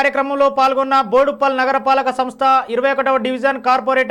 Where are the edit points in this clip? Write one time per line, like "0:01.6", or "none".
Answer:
none